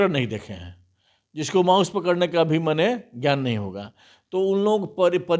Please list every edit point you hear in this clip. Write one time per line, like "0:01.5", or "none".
none